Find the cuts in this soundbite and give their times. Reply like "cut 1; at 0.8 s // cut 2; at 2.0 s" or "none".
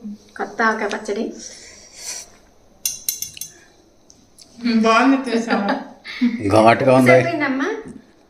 none